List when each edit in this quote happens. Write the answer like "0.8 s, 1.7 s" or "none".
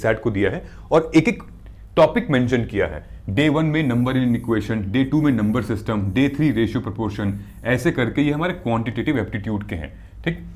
none